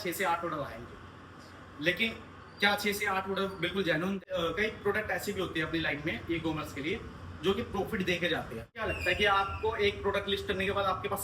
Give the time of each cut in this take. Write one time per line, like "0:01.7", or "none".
0:04.2
0:08.8